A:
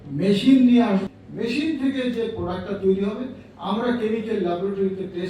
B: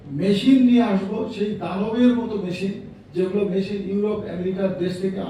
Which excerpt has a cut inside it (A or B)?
A